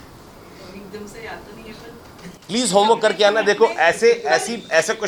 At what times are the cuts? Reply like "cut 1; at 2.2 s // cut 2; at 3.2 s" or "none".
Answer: none